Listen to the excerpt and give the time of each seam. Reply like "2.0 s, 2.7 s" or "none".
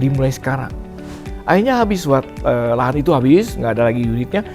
1.1 s